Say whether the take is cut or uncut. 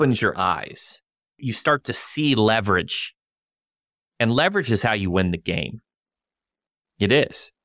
cut